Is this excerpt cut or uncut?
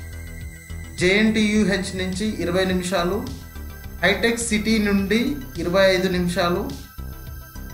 uncut